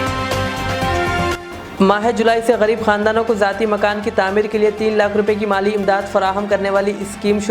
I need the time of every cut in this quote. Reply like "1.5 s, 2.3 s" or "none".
none